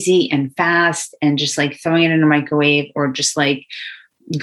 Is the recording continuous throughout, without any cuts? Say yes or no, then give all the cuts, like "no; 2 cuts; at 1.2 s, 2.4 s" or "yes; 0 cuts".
yes; 0 cuts